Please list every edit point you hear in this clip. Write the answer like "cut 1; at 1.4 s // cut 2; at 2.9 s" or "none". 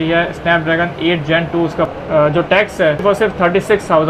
cut 1; at 1.9 s // cut 2; at 3.0 s